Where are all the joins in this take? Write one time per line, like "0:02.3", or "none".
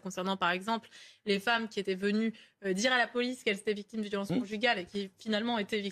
none